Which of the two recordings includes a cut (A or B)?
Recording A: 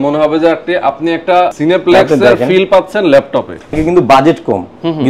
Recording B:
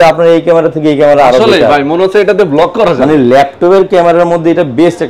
A